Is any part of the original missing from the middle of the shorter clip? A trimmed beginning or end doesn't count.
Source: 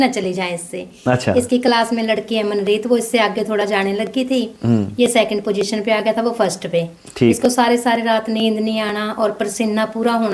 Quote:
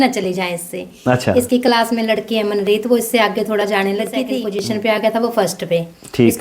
yes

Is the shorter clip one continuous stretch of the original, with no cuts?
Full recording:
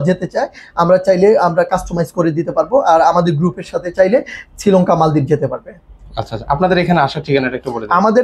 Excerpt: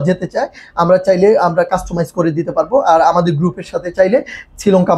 yes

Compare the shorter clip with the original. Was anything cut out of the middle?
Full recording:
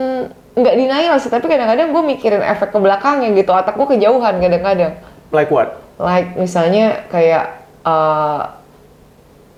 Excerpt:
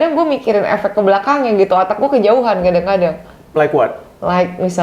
no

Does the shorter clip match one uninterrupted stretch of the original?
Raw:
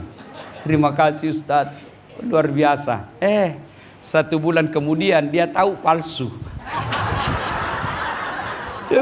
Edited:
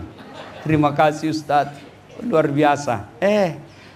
yes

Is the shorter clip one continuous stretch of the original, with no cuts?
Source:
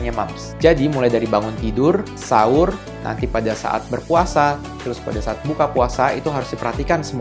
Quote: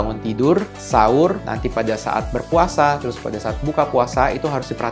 no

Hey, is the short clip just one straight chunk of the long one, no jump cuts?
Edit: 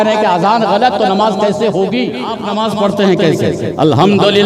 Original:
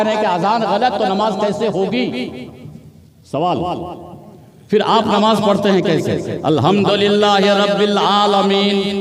no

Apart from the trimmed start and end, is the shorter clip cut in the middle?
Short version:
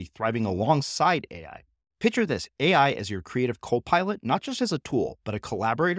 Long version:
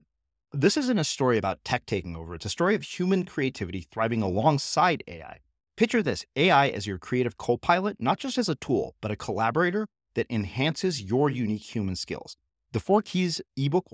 no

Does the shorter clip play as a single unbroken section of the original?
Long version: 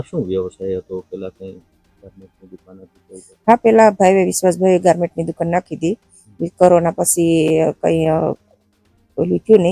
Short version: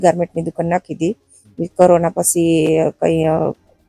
yes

